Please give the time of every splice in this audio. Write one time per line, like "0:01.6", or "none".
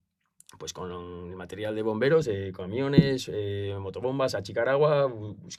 none